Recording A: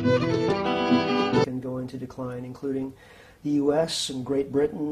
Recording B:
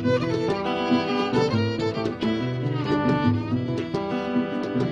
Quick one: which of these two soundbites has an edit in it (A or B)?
B